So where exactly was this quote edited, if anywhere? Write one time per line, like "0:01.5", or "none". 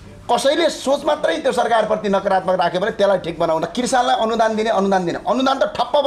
0:03.6